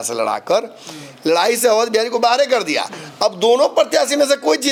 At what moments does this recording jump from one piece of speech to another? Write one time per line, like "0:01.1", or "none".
none